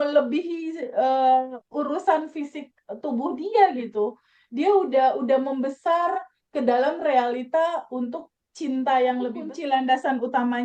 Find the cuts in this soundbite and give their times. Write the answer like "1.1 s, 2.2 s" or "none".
9.5 s